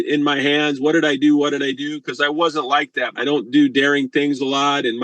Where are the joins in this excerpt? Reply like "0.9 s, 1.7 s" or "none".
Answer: 3.0 s